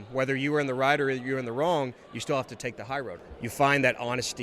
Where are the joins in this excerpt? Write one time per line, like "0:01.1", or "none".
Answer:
0:03.2